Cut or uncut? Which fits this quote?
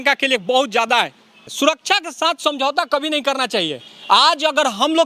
cut